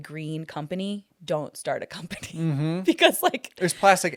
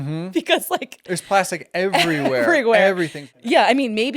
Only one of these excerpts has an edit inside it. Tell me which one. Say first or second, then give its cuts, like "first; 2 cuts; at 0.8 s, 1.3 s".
second; 1 cut; at 3.2 s